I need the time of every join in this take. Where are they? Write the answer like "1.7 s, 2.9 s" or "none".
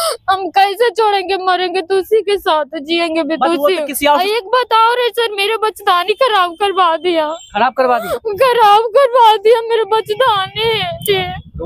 4.2 s